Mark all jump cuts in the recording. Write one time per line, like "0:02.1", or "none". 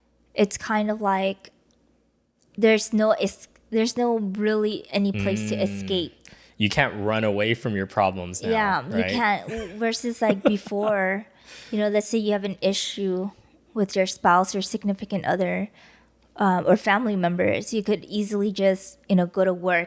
none